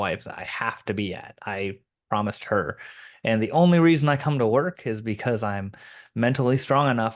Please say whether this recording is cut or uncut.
uncut